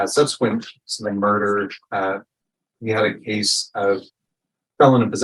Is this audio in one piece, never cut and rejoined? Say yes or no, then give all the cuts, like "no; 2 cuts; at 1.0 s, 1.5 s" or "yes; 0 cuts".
yes; 0 cuts